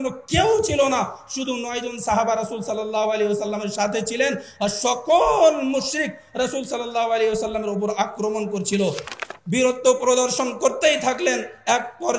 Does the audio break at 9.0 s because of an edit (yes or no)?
yes